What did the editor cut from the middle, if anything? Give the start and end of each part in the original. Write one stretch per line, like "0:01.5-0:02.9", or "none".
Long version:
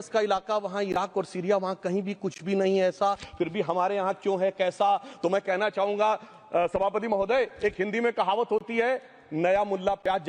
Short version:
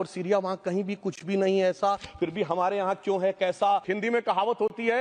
0:05.1-0:07.8